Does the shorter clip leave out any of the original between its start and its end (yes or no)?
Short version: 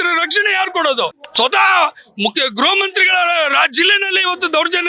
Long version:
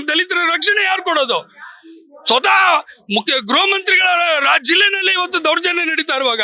yes